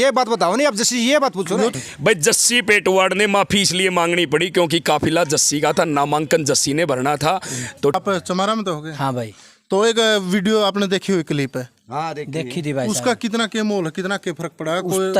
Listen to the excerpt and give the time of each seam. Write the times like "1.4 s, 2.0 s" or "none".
1.8 s, 7.9 s